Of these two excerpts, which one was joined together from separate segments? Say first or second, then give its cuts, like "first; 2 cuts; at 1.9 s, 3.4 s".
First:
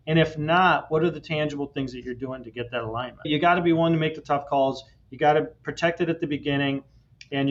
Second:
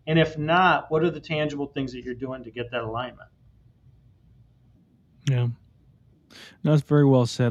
first; 1 cut; at 3.3 s